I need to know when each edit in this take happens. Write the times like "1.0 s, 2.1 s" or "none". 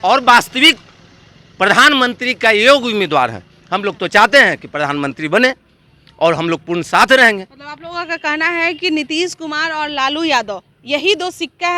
none